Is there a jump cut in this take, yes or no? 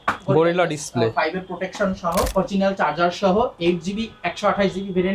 yes